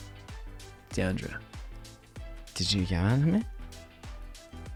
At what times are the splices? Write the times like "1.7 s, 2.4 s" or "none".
none